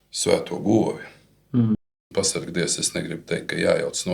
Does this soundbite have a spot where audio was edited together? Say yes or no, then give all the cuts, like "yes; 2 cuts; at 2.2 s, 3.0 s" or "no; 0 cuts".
yes; 1 cut; at 1.9 s